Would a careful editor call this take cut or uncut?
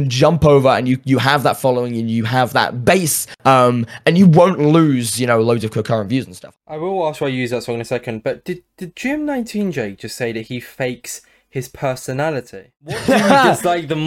cut